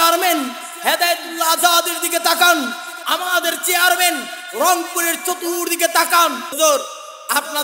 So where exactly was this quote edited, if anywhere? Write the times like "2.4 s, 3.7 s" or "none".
6.6 s